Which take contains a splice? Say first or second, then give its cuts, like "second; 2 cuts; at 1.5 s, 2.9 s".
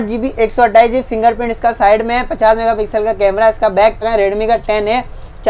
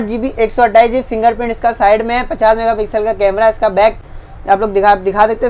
first; 1 cut; at 4.1 s